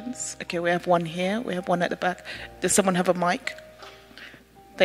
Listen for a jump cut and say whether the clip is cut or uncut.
uncut